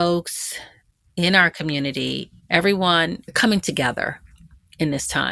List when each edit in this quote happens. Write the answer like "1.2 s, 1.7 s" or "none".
2.3 s